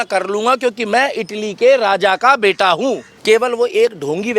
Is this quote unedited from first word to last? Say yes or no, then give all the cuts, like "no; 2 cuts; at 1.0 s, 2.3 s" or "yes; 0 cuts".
no; 1 cut; at 3.1 s